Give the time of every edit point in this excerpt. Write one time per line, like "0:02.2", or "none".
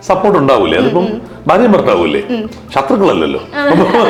none